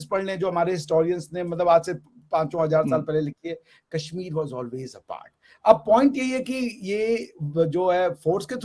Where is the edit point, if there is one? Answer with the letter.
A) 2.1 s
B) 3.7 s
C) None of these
C